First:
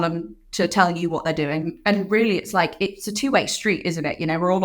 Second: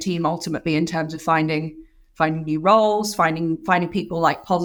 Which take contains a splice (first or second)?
first